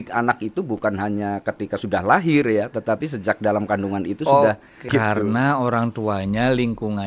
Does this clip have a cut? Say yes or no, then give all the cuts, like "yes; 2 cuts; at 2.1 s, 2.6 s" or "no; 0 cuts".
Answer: yes; 1 cut; at 4.8 s